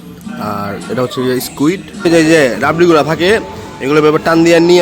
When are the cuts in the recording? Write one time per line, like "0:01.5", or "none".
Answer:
0:01.9